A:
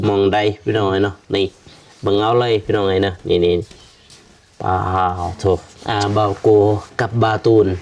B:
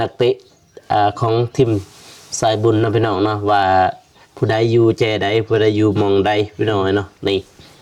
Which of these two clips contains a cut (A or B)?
A